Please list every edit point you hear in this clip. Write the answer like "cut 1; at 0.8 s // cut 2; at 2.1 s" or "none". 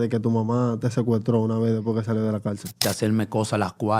cut 1; at 2.8 s